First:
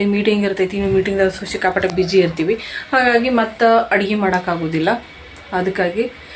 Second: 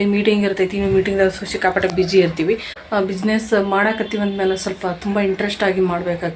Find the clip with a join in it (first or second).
second